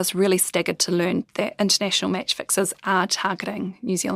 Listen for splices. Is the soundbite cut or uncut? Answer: uncut